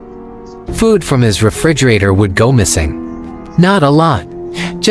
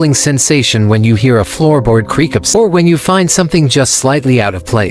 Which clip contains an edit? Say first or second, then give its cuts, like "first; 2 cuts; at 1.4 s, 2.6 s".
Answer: second; 2 cuts; at 1.2 s, 2.5 s